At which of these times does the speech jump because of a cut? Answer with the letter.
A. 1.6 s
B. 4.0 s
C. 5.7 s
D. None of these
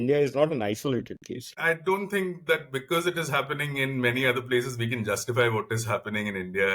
A